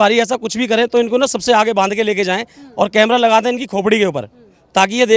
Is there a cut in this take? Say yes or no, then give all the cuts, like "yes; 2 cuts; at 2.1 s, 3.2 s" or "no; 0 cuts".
no; 0 cuts